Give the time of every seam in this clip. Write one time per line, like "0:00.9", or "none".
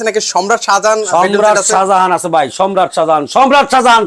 none